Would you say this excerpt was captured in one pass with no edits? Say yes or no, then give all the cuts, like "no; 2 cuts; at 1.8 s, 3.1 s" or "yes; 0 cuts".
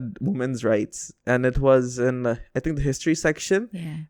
yes; 0 cuts